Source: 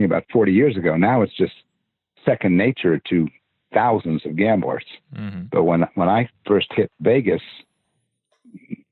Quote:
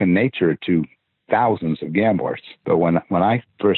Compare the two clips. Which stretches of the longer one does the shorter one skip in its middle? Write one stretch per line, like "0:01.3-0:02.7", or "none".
0:04.9-0:05.3